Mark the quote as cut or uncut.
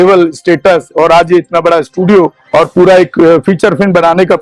cut